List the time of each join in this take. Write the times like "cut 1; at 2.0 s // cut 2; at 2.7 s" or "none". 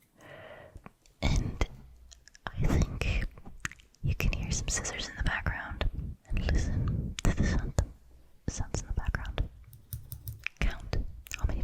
cut 1; at 6.2 s